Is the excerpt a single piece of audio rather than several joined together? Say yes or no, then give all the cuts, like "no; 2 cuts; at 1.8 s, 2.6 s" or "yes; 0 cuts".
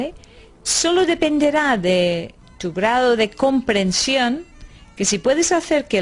yes; 0 cuts